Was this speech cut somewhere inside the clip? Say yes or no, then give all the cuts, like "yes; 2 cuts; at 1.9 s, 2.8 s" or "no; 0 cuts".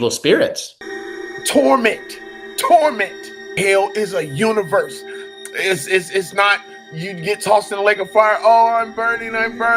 yes; 1 cut; at 1.0 s